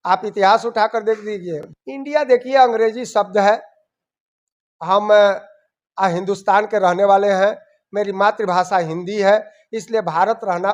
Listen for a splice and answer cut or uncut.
cut